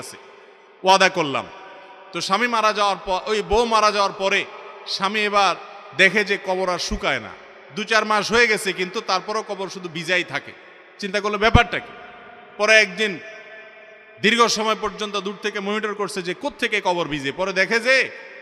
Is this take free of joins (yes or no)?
yes